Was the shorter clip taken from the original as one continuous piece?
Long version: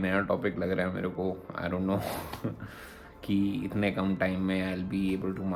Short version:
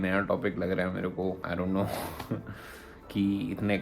no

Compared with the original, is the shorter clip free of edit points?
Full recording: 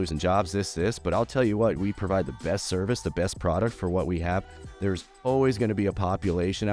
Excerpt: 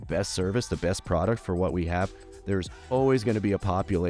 yes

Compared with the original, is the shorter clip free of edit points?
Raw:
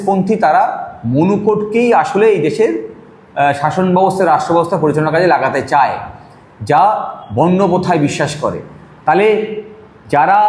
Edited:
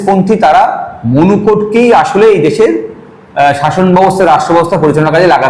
yes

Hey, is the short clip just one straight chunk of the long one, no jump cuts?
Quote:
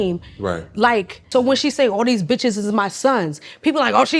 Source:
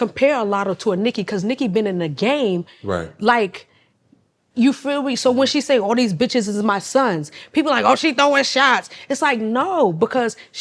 no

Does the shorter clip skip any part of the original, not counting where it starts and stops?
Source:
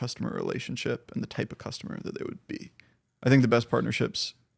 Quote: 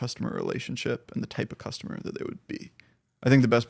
no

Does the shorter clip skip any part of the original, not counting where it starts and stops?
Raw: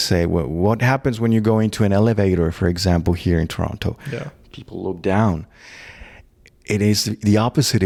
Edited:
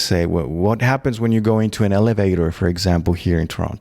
no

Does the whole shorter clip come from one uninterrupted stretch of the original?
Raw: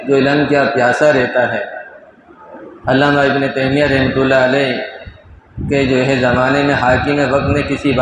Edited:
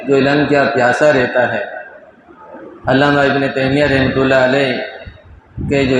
yes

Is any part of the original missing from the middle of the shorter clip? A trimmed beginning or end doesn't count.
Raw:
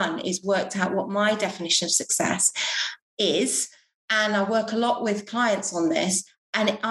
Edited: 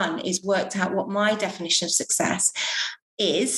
no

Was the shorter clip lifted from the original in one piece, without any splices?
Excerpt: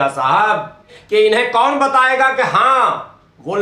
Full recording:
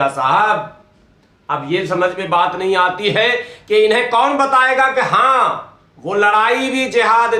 no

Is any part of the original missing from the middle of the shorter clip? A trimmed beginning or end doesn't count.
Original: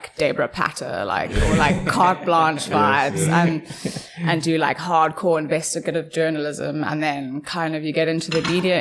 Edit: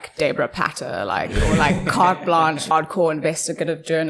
yes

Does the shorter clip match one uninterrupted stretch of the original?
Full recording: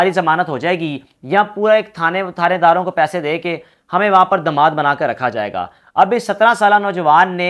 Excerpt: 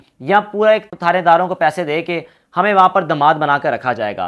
no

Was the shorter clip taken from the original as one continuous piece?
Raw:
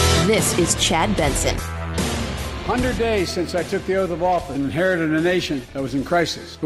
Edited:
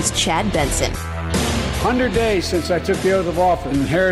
no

